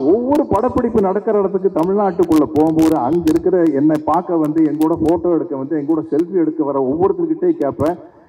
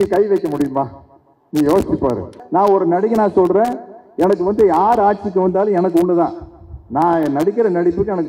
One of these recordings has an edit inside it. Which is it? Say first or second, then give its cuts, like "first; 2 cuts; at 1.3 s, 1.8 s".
second; 1 cut; at 2.3 s